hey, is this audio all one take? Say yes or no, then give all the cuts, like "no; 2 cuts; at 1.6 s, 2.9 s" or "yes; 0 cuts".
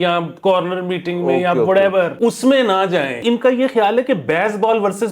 no; 2 cuts; at 2.1 s, 3.2 s